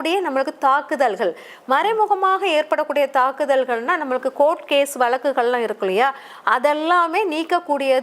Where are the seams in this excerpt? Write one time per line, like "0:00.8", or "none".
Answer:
none